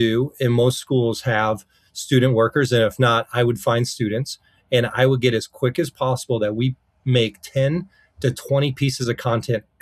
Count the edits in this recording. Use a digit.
0